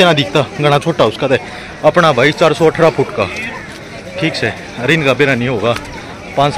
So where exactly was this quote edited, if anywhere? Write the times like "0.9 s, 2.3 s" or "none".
none